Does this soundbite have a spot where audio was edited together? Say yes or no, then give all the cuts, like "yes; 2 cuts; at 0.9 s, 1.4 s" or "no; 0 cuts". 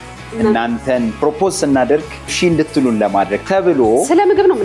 yes; 1 cut; at 2.3 s